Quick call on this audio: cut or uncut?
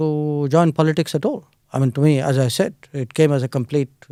uncut